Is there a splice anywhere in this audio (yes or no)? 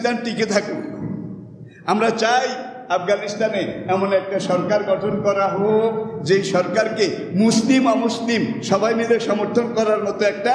no